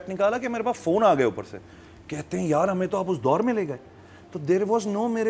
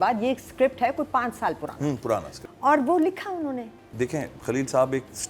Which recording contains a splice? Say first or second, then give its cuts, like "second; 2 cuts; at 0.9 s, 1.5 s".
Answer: second; 2 cuts; at 2.4 s, 3.8 s